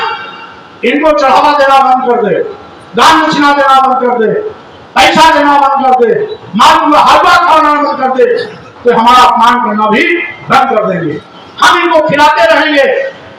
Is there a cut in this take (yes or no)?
no